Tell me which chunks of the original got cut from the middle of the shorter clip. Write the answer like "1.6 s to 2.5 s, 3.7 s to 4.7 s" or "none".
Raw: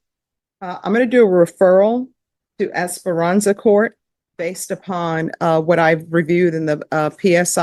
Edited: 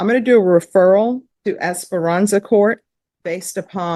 2.2 s to 2.4 s